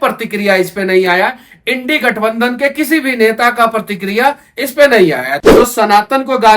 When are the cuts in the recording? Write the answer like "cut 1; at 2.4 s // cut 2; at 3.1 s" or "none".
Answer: cut 1; at 5.3 s